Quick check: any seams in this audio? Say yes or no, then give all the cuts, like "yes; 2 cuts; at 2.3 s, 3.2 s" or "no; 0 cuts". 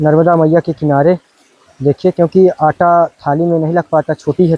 no; 0 cuts